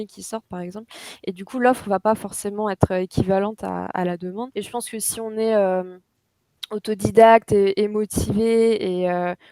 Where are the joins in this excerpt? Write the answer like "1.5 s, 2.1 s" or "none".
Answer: 4.5 s